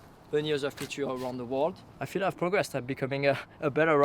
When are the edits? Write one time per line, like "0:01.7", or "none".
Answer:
0:02.0